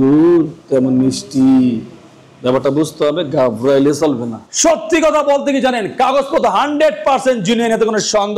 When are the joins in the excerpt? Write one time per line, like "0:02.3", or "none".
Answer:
0:04.4